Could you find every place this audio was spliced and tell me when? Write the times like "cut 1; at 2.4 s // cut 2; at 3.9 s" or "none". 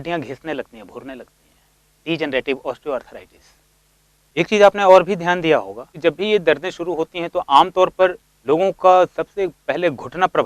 cut 1; at 5.8 s // cut 2; at 8.3 s